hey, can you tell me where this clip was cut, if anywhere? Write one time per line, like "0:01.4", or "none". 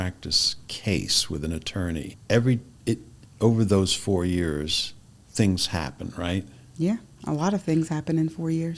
0:02.1